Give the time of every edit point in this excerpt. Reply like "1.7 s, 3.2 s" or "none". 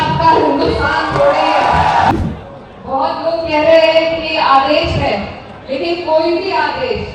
2.1 s